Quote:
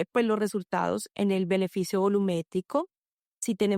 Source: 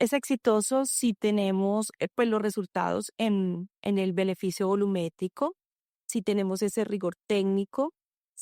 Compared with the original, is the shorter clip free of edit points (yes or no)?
no